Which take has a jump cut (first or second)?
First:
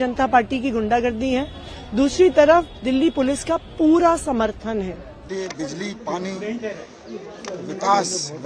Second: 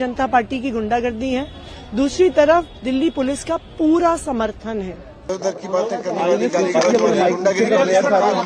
second